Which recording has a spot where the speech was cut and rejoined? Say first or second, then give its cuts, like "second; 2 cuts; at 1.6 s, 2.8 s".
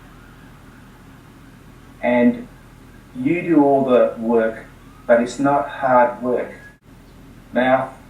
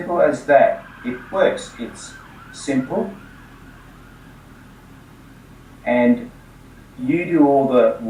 first; 1 cut; at 6.6 s